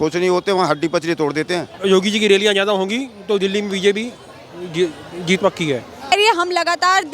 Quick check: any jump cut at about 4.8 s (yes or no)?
no